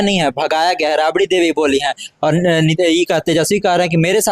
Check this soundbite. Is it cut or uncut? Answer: uncut